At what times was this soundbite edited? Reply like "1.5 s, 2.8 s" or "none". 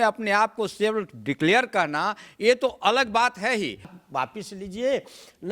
4.0 s